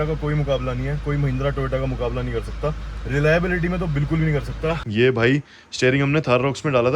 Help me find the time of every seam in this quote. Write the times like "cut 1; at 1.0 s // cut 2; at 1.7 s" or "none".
cut 1; at 4.8 s